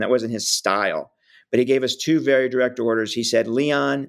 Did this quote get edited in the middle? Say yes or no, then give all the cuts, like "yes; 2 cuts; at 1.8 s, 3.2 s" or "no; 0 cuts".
no; 0 cuts